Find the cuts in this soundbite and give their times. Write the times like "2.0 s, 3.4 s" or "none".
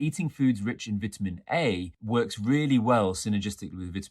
1.9 s